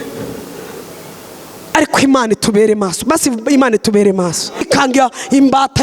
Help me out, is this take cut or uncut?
cut